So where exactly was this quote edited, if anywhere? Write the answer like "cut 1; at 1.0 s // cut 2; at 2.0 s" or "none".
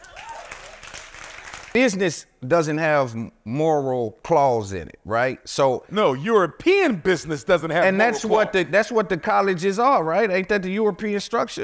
cut 1; at 1.6 s